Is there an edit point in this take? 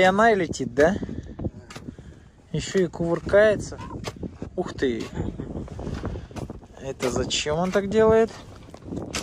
yes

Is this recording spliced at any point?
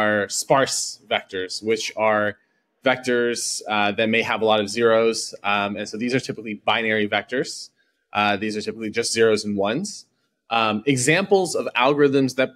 no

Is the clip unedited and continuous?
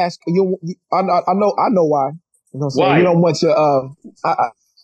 yes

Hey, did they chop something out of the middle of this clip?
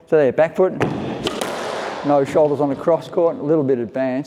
no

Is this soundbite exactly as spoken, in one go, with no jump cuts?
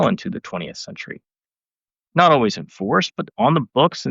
no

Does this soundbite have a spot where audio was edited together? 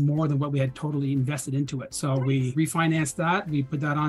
yes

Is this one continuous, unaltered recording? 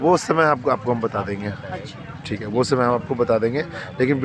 yes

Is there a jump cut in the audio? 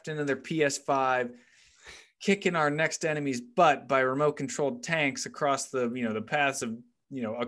no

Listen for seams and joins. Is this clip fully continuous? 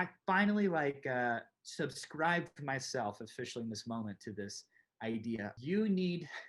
no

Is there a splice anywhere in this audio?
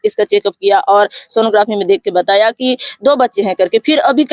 no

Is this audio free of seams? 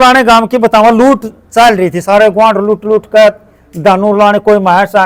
yes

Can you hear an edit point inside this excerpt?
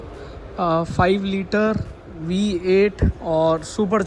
yes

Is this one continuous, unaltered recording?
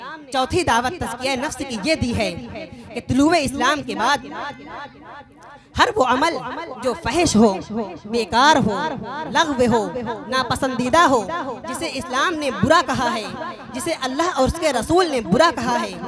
yes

